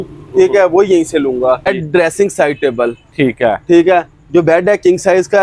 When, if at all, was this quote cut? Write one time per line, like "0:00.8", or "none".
0:01.7